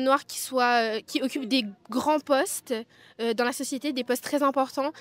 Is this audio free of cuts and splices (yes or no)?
yes